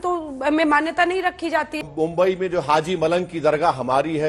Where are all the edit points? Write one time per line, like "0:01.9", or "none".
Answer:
0:01.8